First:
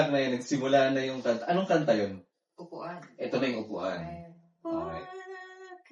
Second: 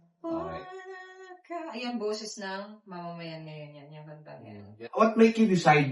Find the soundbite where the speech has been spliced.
second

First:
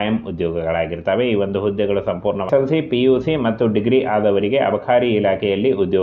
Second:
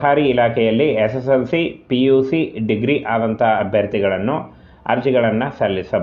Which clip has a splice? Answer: first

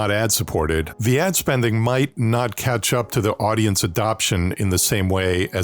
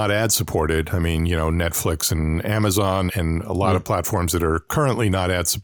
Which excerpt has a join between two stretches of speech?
first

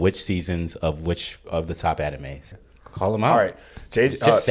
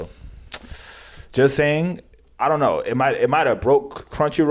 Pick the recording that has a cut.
first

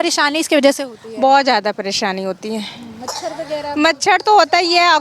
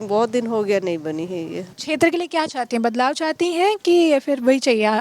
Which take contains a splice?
second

